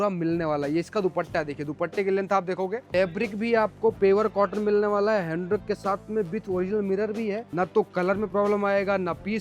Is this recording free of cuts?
no; 2 cuts; at 2.9 s, 7.4 s

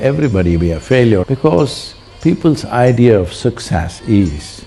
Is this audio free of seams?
no; 1 cut; at 1.2 s

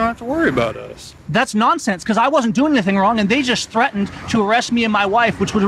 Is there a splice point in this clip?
no; 0 cuts

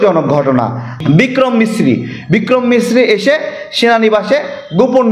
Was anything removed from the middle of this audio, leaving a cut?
yes; 1 cut; at 1.0 s

